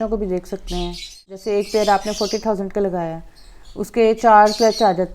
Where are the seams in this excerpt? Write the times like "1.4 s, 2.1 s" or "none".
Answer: 1.4 s